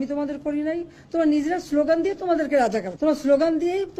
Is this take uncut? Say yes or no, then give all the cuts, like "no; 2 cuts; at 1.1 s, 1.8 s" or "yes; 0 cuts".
no; 1 cut; at 2.9 s